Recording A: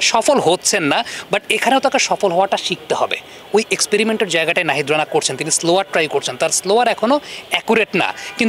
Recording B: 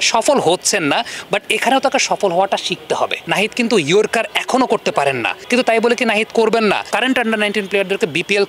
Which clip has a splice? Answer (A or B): B